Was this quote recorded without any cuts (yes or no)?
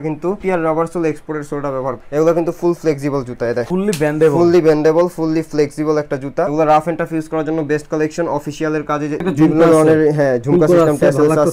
no